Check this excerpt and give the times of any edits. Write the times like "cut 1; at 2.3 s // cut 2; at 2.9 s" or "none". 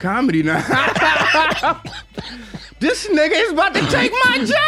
none